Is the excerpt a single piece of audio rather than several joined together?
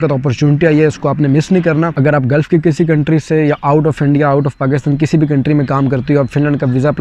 no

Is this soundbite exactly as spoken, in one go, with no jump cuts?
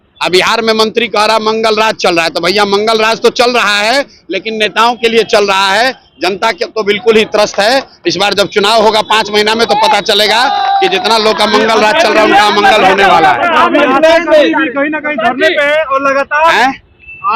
yes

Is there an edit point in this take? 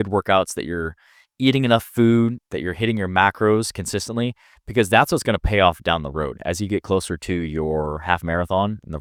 no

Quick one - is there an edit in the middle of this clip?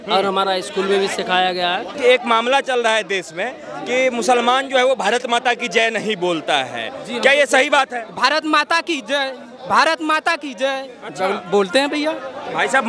yes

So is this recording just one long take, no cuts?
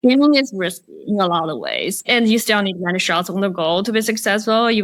yes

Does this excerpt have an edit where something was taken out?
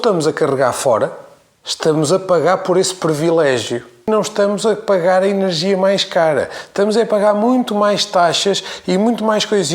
yes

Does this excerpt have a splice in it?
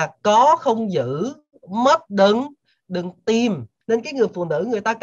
yes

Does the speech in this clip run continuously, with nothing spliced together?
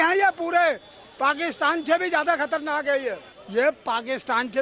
no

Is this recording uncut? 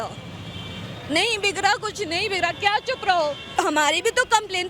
no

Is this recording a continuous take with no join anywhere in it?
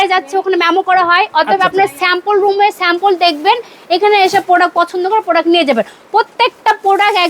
yes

